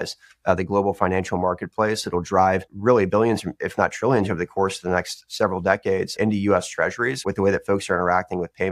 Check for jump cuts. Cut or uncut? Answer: cut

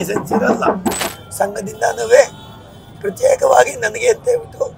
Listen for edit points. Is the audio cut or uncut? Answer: cut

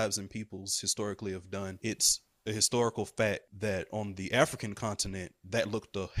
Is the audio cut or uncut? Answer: cut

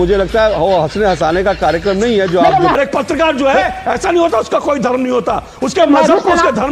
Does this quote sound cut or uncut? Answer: cut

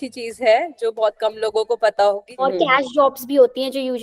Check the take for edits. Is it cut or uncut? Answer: cut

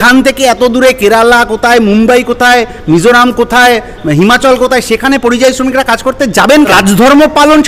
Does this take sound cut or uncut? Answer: cut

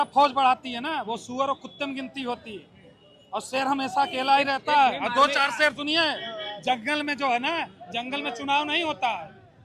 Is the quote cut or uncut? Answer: uncut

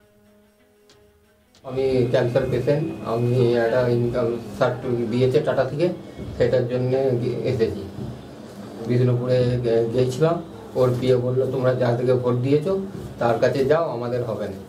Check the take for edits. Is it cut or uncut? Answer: cut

